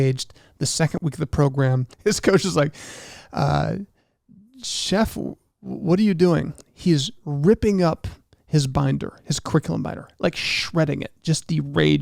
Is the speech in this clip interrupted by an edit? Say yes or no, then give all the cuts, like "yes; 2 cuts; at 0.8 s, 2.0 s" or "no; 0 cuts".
yes; 2 cuts; at 0.9 s, 1.9 s